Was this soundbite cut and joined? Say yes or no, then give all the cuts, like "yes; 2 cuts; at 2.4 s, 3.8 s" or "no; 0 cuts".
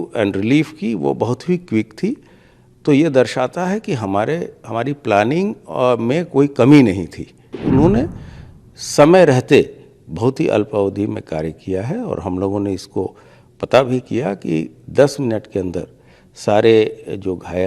yes; 1 cut; at 7.5 s